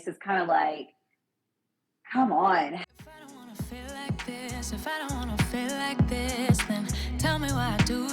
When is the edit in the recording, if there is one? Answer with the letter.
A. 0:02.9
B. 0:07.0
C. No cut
A